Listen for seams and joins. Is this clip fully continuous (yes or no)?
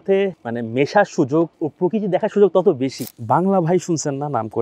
no